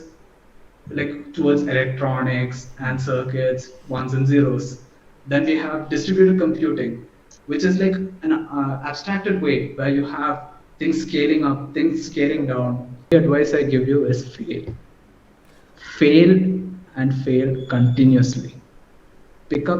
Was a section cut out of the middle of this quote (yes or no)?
yes